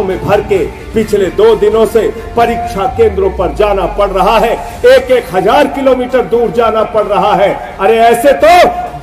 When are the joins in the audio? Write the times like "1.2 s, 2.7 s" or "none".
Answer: none